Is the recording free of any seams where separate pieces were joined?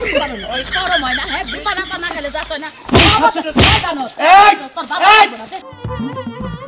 no; 1 cut; at 5.5 s

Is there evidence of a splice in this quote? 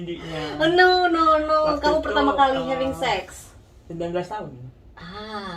no; 0 cuts

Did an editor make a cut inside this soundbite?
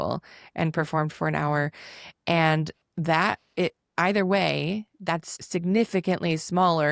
no; 0 cuts

